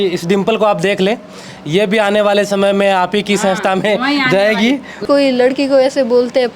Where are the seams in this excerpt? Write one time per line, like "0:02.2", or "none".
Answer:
0:05.0